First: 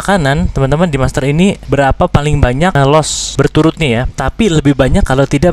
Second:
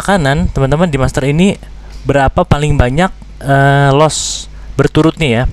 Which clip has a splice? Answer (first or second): first